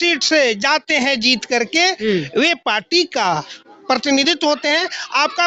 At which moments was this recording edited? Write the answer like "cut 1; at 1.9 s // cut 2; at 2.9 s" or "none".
none